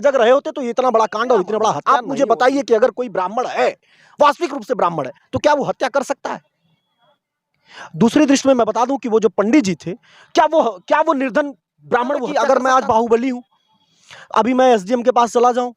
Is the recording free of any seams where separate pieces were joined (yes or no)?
no